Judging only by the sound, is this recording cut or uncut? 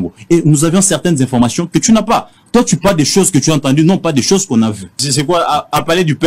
cut